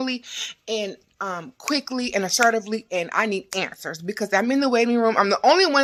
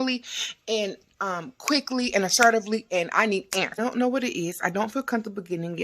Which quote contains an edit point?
second; 1 cut; at 3.8 s

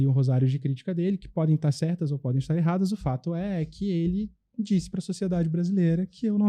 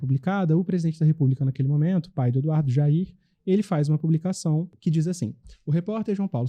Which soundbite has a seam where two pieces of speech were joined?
second; 1 cut; at 4.7 s

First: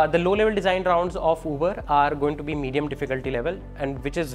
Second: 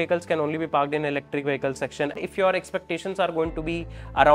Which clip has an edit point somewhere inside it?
second; 1 cut; at 2.2 s

